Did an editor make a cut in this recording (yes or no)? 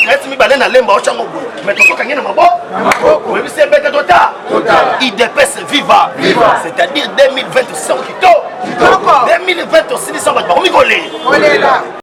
no